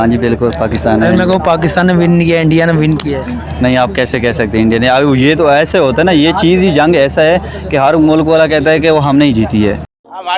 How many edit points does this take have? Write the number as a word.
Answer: zero